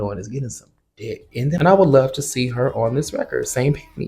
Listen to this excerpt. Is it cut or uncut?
cut